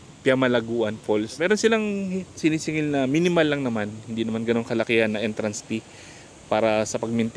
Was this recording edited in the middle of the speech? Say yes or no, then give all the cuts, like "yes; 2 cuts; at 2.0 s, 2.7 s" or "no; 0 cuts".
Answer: yes; 1 cut; at 1.4 s